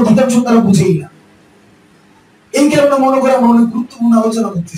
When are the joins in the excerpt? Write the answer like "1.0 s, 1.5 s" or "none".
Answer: none